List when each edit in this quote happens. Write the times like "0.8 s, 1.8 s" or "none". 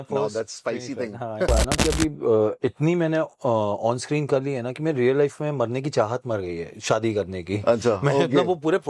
1.5 s